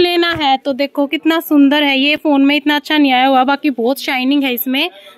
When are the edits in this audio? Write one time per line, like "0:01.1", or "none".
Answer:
none